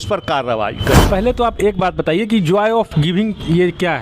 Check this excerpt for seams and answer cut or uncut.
cut